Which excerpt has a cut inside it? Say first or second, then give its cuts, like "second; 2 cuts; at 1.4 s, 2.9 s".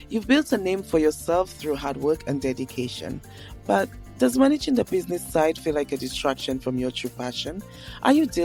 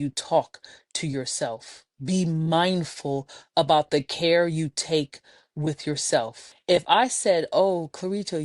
second; 1 cut; at 6.5 s